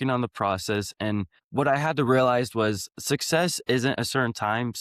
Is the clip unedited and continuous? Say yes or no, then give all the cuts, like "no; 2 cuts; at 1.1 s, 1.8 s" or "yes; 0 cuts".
yes; 0 cuts